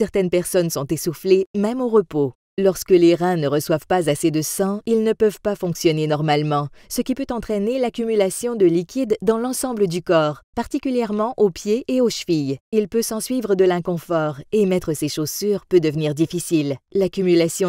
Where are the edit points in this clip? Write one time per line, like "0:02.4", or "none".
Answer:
0:04.1